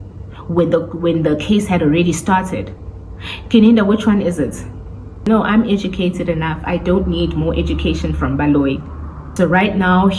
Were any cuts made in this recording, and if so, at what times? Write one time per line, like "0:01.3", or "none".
0:05.2
0:09.2